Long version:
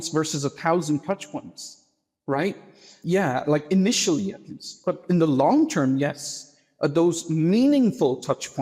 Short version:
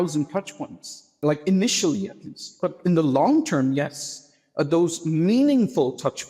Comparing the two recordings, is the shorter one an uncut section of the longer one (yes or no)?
no